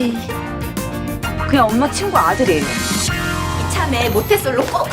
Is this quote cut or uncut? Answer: cut